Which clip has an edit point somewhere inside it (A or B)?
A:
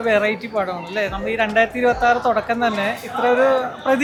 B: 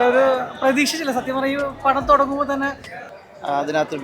B